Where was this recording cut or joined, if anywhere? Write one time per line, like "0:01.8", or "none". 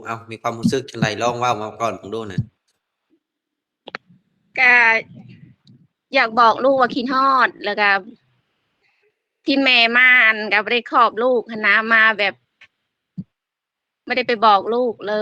none